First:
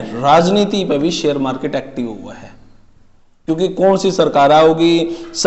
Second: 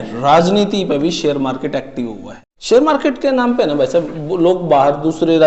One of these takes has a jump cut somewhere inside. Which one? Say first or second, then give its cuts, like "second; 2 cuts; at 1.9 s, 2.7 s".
second; 1 cut; at 2.5 s